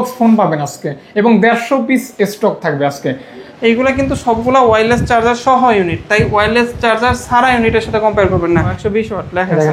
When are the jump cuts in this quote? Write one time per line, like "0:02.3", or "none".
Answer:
0:03.4
0:08.7